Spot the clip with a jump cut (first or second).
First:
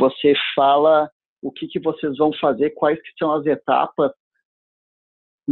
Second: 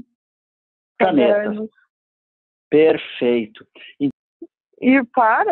second